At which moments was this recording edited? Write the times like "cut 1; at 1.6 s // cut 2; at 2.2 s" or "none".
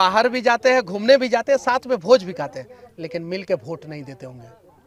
none

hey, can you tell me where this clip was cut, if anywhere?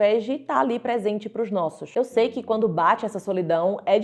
cut 1; at 1.9 s

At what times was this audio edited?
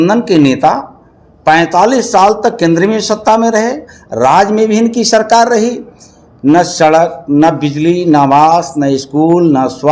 none

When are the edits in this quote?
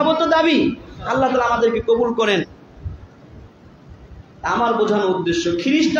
cut 1; at 2.4 s

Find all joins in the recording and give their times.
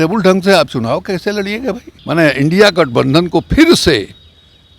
cut 1; at 1.9 s

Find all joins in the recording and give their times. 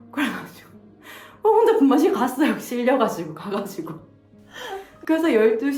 none

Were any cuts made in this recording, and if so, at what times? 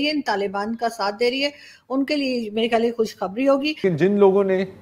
cut 1; at 3.7 s

